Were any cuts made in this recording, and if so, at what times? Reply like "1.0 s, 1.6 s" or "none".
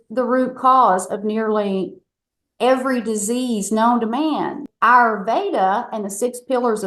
4.6 s